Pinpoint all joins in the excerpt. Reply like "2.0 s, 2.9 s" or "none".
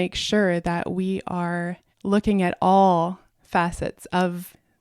1.9 s, 3.3 s